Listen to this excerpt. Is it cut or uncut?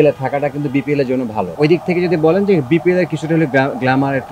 cut